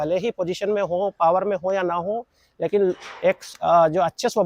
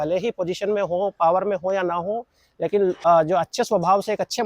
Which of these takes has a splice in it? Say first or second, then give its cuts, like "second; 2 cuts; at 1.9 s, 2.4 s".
second; 1 cut; at 3.0 s